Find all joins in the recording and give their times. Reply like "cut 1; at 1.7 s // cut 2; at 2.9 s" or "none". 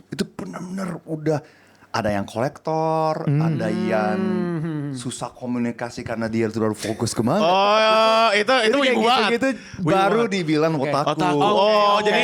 none